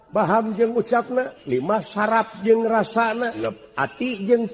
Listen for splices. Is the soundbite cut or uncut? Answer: cut